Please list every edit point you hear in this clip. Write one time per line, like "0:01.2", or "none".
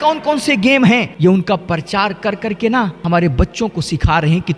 0:01.1
0:03.0